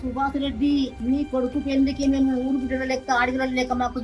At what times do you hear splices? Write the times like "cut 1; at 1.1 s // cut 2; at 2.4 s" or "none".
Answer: cut 1; at 1.0 s